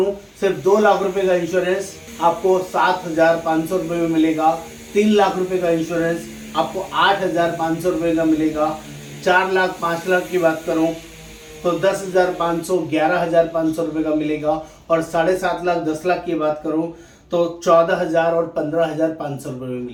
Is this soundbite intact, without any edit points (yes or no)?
yes